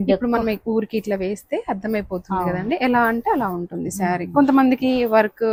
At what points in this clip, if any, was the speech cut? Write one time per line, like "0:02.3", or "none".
none